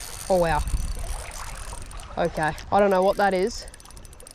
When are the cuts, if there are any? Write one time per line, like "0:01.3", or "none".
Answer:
0:02.6